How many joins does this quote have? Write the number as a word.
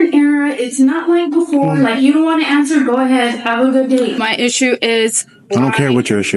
one